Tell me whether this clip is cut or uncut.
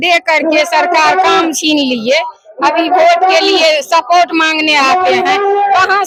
uncut